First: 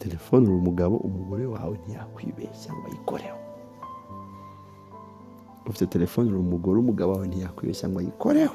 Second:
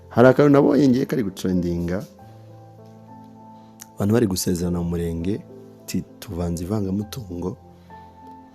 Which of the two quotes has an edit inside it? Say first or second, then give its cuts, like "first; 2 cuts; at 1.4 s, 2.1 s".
second; 1 cut; at 7.6 s